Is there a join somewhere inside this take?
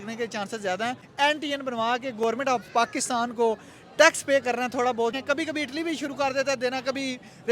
yes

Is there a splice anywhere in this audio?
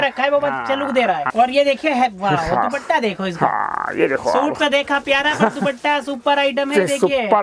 yes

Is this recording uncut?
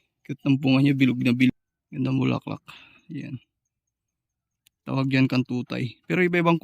no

